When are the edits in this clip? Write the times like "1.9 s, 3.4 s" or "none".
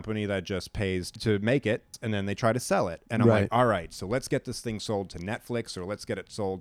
1.1 s, 1.9 s

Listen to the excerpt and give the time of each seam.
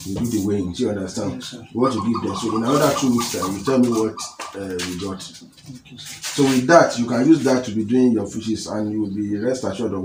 none

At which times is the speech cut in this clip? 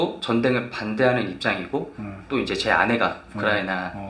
none

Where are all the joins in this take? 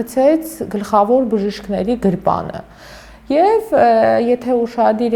none

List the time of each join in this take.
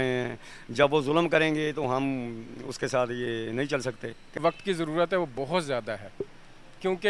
4.4 s

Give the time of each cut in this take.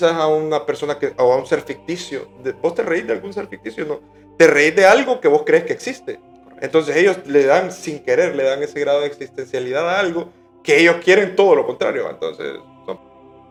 none

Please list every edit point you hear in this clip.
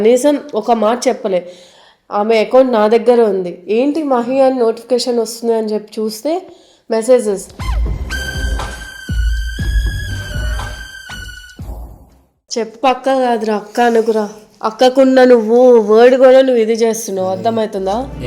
12.3 s

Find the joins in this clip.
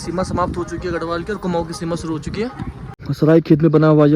2.9 s

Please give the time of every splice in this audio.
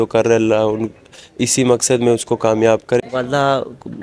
3.0 s

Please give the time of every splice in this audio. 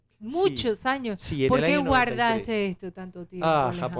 none

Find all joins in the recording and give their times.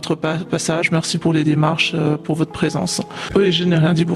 3.2 s

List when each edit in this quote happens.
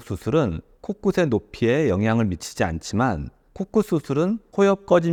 none

